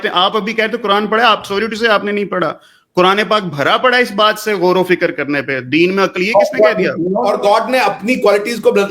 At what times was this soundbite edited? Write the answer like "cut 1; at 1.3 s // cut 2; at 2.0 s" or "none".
cut 1; at 7.2 s